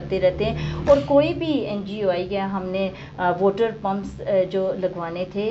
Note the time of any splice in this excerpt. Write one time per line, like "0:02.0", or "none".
none

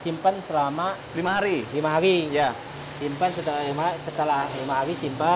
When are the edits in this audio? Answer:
none

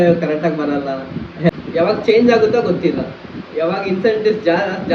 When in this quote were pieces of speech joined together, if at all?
0:01.6

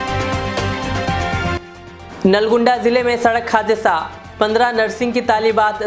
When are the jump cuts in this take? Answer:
0:01.7

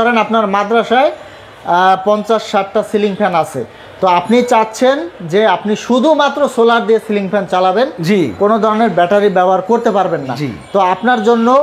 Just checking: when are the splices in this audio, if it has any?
none

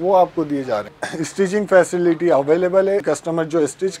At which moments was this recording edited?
0:00.9
0:03.0

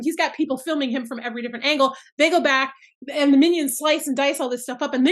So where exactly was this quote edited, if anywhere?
none

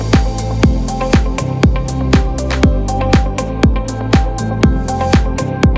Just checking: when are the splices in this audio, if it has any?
none

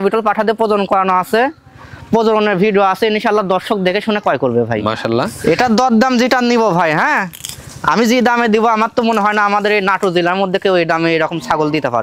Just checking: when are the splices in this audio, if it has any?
0:05.3

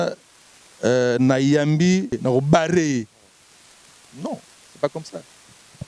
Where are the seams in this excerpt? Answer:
0:02.2

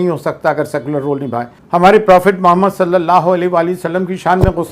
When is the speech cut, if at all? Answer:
0:01.5

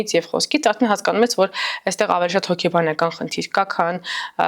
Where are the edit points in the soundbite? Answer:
none

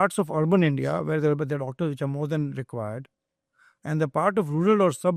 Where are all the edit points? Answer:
none

